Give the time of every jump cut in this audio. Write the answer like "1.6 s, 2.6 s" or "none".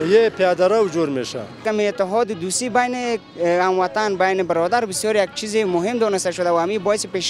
1.6 s